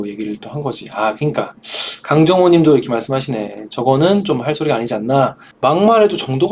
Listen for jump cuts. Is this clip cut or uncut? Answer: cut